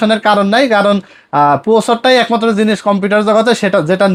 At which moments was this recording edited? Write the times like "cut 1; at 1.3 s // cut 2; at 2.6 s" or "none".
none